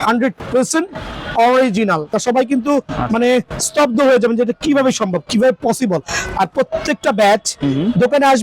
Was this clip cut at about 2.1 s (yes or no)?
yes